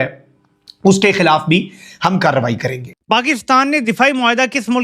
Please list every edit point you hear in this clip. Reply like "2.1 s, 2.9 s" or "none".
2.9 s